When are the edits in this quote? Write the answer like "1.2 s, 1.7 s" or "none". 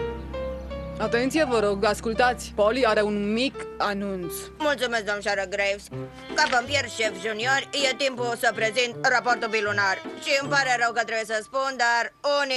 11.6 s

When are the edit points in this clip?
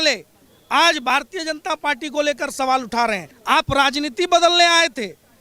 3.3 s

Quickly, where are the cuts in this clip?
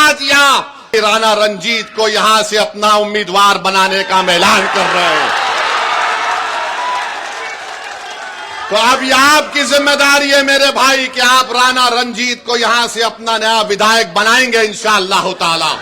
0.9 s

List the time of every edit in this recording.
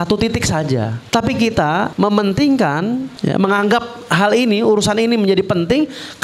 1.0 s, 1.9 s, 3.1 s

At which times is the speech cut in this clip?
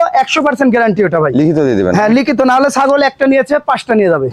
none

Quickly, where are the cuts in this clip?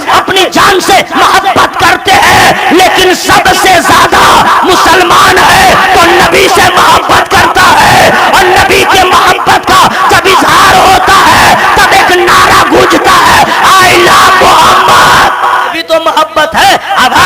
15.8 s

